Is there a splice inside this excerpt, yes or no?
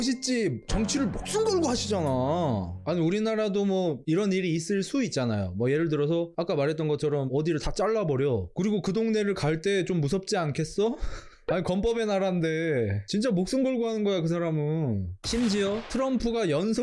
no